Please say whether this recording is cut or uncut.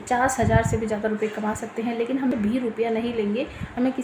cut